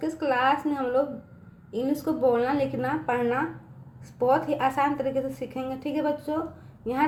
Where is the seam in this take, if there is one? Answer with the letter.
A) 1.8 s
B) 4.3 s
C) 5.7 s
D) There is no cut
D